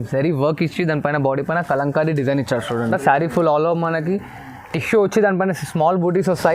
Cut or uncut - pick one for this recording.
cut